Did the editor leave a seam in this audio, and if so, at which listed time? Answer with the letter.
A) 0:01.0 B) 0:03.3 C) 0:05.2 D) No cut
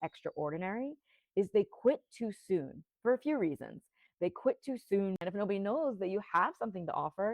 C